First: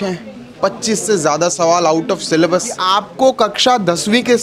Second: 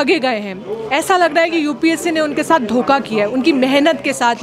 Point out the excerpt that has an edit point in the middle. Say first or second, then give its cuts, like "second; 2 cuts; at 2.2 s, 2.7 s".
first; 1 cut; at 2.8 s